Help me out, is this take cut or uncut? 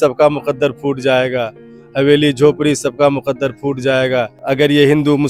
uncut